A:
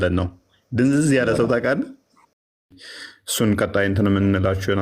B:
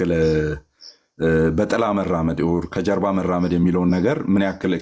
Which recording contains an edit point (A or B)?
A